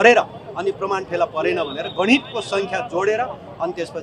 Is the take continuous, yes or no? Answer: yes